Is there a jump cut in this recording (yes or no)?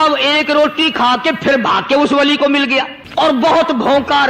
yes